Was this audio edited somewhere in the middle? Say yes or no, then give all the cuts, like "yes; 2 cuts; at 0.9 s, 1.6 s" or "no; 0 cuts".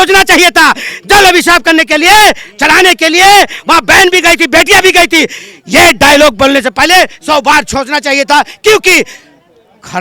no; 0 cuts